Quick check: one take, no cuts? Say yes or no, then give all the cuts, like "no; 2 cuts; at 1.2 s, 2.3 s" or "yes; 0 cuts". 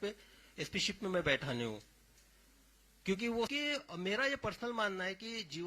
no; 1 cut; at 3.5 s